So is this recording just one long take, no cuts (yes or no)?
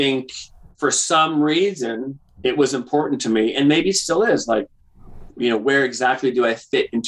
yes